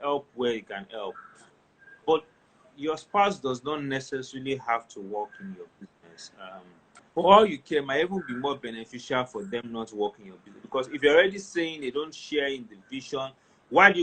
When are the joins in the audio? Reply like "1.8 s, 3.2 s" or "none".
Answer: 6.9 s